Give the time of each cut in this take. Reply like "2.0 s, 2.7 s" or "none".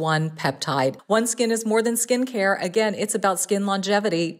1.0 s

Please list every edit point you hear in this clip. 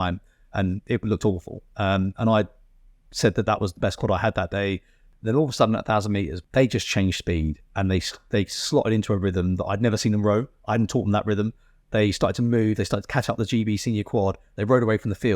5.0 s, 6.4 s

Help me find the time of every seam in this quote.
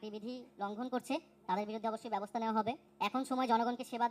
2.9 s

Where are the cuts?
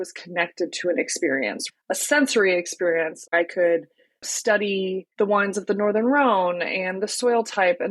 1.6 s, 3.3 s, 5.1 s

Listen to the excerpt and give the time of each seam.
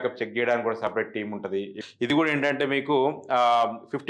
1.8 s

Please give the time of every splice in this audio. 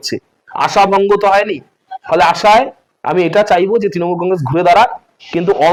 none

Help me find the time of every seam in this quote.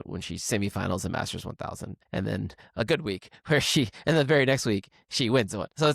1.9 s

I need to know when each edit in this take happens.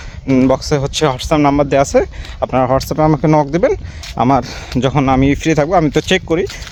none

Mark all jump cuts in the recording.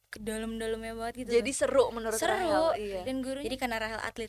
3.3 s

